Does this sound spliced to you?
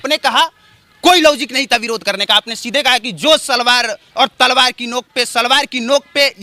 no; 0 cuts

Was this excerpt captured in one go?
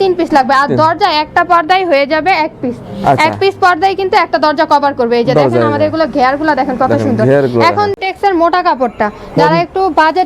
yes; 0 cuts

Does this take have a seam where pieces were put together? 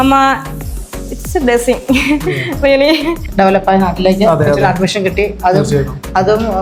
yes; 1 cut; at 3.3 s

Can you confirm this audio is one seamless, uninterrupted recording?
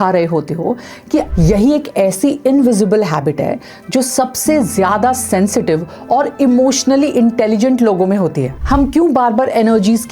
no; 2 cuts; at 1.3 s, 8.5 s

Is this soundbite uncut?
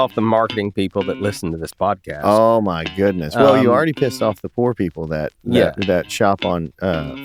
yes; 0 cuts

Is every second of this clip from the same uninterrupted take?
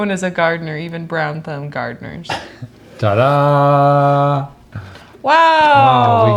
yes; 0 cuts

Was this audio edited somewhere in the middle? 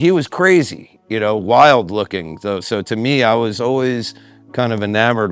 no; 0 cuts

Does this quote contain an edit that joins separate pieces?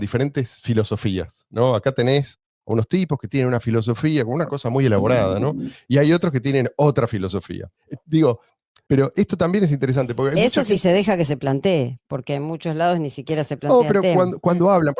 no; 0 cuts

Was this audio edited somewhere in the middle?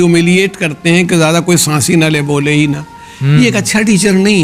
no; 0 cuts

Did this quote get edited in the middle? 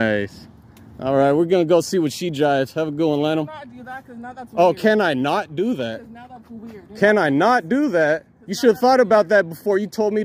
no; 0 cuts

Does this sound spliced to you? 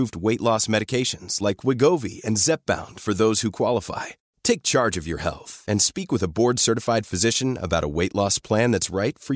no; 0 cuts

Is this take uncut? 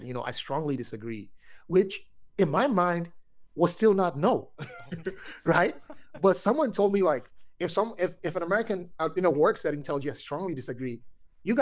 yes; 0 cuts

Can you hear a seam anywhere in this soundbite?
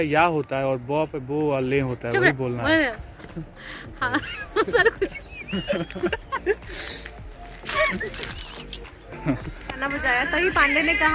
yes; 1 cut; at 9.8 s

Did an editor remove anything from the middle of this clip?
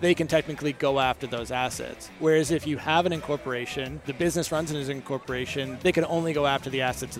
yes; 2 cuts; at 4.0 s, 5.7 s

